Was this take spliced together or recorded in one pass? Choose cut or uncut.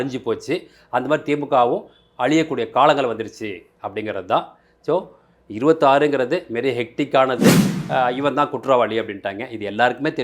cut